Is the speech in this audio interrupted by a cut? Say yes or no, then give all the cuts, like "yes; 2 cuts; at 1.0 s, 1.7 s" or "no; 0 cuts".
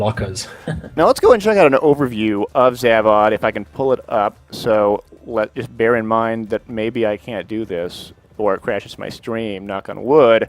yes; 1 cut; at 1.2 s